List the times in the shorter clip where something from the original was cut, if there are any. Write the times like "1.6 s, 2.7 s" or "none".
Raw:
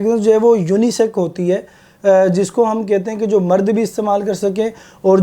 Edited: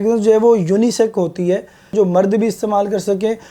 1.8 s